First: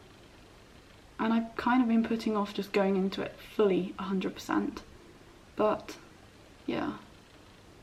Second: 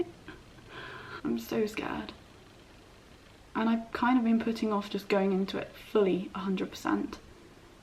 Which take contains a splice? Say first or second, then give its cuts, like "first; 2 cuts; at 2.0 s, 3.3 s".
second; 1 cut; at 1.0 s